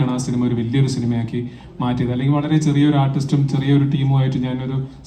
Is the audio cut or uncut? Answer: uncut